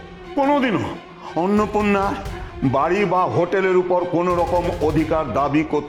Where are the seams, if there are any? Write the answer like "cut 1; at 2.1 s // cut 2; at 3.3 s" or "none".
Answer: none